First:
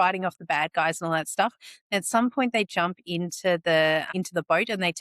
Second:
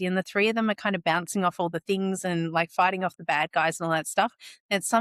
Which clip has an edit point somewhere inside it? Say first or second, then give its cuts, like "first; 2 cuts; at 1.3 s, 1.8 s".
first; 1 cut; at 4.1 s